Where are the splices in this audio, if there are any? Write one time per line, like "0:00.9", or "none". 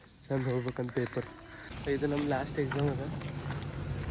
0:01.7